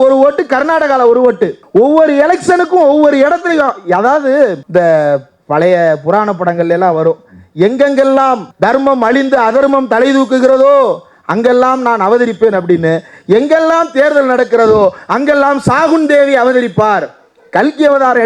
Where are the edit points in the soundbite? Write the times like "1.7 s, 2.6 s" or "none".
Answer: none